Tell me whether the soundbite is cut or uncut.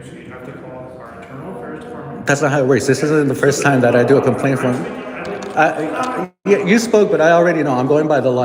uncut